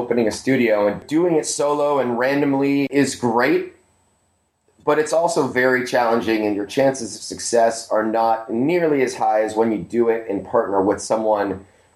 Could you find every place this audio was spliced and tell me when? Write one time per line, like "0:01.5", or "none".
0:01.0
0:02.9